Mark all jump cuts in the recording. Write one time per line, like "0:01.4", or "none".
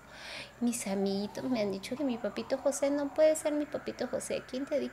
0:02.0